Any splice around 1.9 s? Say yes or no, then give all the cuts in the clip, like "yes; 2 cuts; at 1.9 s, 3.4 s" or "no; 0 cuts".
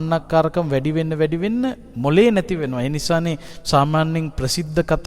yes; 1 cut; at 1.9 s